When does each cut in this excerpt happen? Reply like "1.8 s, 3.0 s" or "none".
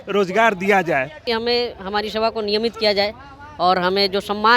1.3 s